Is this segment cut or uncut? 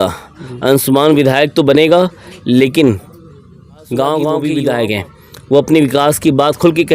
cut